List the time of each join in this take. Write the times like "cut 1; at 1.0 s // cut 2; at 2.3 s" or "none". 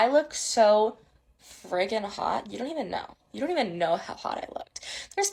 none